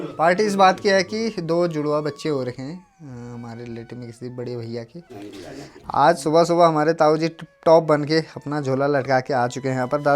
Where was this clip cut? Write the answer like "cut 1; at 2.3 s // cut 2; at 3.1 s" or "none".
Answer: cut 1; at 5.2 s